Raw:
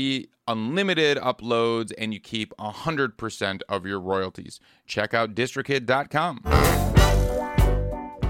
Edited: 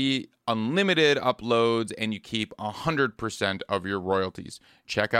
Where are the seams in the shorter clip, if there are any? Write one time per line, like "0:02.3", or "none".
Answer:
none